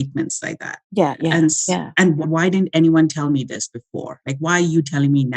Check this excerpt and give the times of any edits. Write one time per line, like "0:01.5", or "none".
0:02.2